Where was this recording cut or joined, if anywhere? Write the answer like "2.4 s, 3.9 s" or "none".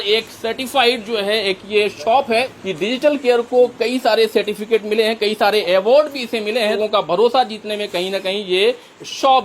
2.5 s, 6.8 s